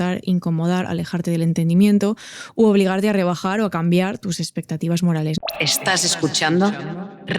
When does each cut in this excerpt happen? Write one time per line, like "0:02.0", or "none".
0:05.4